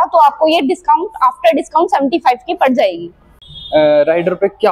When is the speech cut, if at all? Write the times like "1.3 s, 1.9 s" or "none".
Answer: 3.5 s